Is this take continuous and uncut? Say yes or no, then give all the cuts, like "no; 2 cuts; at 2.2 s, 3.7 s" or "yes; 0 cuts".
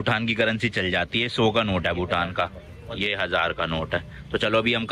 yes; 0 cuts